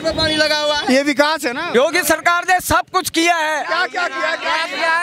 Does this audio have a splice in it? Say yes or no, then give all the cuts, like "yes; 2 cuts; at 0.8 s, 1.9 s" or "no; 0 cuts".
yes; 1 cut; at 1.6 s